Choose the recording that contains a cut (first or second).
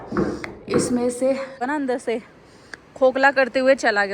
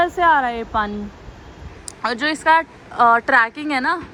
first